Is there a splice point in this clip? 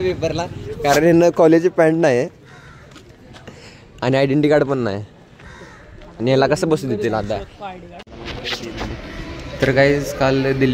yes; 1 cut; at 8.0 s

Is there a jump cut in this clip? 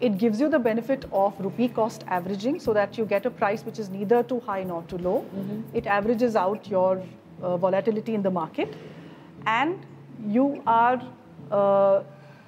no; 0 cuts

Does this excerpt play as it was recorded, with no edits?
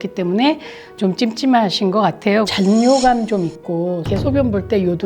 no; 2 cuts; at 2.5 s, 4.1 s

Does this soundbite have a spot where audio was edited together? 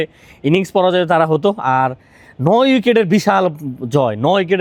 no; 0 cuts

